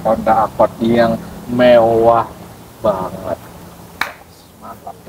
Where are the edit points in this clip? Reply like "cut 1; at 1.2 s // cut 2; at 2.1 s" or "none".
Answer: none